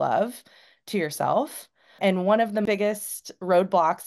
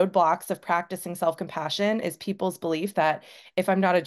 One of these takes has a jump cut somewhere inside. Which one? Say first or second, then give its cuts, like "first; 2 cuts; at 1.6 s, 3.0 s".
first; 2 cuts; at 1.9 s, 2.6 s